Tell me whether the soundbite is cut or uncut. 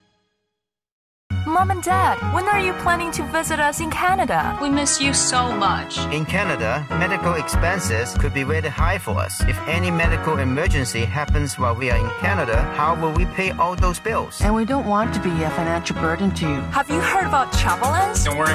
cut